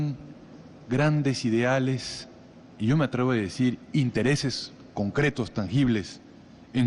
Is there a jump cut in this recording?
yes; 1 cut; at 2.2 s

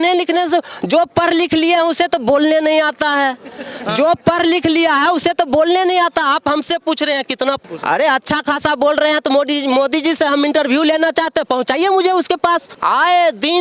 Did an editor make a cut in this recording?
yes; 2 cuts; at 7.6 s, 12.7 s

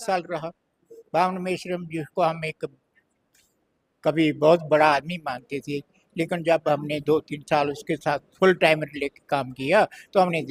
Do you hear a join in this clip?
no; 0 cuts

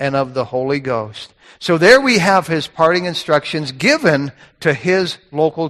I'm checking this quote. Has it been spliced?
no; 0 cuts

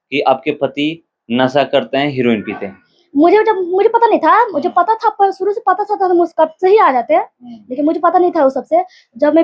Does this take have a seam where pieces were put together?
no; 0 cuts

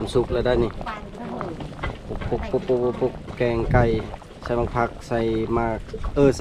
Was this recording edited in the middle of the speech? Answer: no; 0 cuts

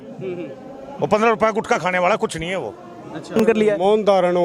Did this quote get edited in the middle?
yes; 1 cut; at 3.4 s

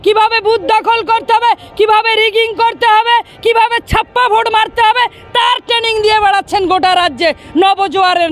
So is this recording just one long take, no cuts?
yes; 0 cuts

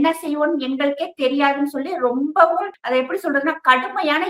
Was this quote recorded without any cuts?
no; 1 cut; at 2.8 s

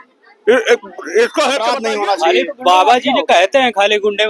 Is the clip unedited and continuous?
no; 1 cut; at 1.7 s

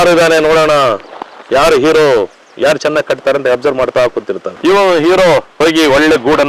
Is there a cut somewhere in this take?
no; 0 cuts

